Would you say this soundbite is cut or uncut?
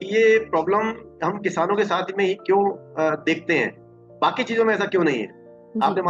uncut